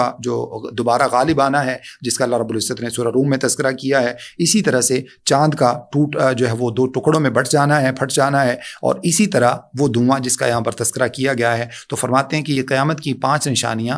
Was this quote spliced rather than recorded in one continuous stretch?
no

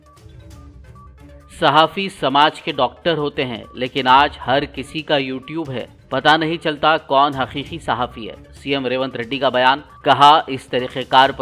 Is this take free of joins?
no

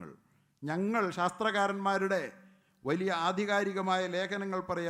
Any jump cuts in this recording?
no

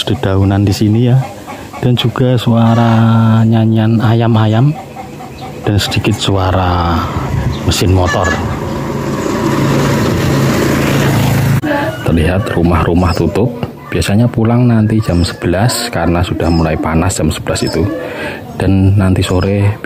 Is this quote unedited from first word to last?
no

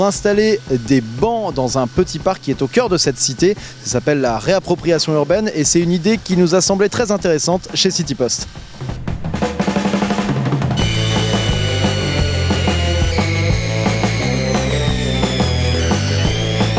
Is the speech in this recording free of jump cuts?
yes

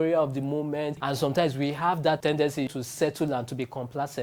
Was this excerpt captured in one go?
no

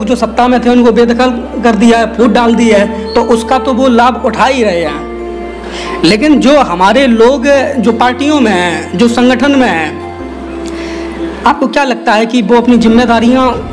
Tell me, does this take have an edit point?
no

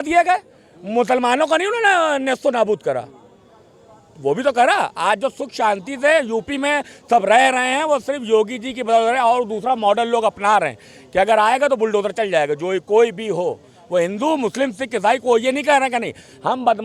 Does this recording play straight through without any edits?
yes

